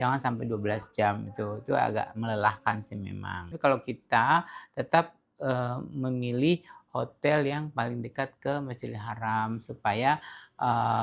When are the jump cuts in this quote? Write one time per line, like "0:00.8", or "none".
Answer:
0:03.5